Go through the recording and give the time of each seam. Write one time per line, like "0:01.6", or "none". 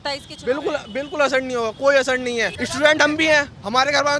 0:02.6